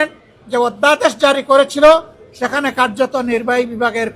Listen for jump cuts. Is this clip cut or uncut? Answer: uncut